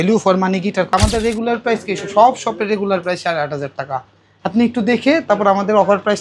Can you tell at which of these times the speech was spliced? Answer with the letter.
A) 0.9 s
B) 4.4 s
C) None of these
A